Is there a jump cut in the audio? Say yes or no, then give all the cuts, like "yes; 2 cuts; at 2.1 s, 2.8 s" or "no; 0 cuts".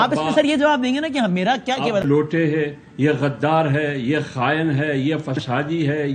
yes; 1 cut; at 2.0 s